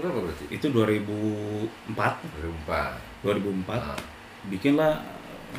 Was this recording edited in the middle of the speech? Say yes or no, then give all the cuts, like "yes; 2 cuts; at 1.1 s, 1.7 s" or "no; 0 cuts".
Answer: yes; 2 cuts; at 1.8 s, 4.4 s